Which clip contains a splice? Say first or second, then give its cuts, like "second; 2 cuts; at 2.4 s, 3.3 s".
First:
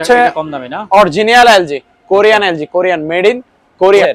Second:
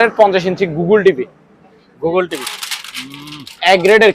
second; 1 cut; at 2.4 s